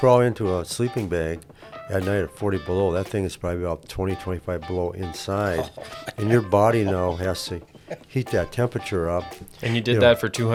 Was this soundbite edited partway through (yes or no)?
no